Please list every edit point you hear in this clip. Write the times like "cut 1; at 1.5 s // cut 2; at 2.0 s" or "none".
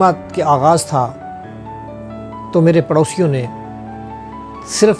cut 1; at 1.1 s // cut 2; at 2.5 s